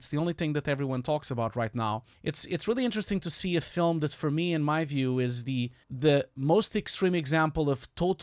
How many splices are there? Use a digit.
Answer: 2